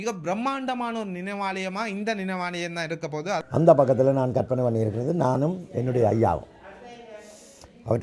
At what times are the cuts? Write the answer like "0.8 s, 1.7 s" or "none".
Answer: 3.4 s